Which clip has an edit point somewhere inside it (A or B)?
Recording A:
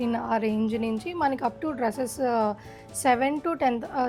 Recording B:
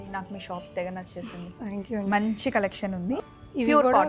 B